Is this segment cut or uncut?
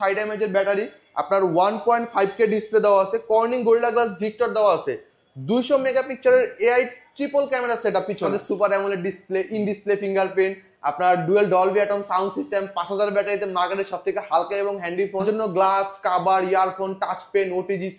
cut